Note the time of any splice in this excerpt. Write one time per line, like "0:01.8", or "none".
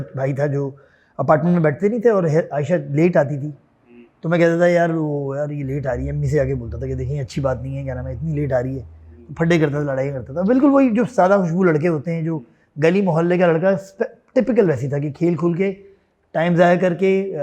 none